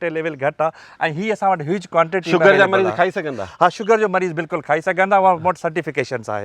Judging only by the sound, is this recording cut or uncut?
uncut